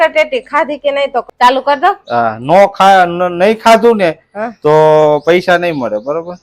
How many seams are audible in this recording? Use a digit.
1